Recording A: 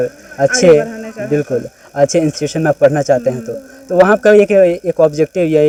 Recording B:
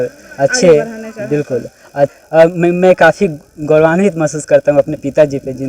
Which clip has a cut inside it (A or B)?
B